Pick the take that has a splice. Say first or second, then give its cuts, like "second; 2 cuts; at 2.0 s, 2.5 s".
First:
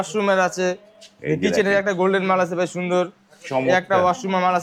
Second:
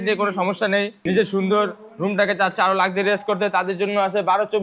second; 1 cut; at 1.0 s